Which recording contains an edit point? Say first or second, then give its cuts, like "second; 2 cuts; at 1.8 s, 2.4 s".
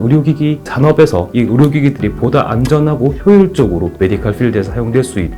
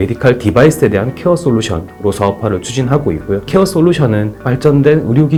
first; 2 cuts; at 1.3 s, 3.9 s